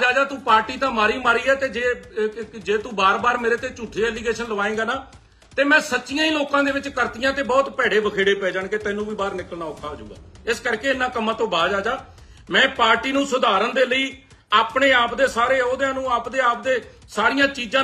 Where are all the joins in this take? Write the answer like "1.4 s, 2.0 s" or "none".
none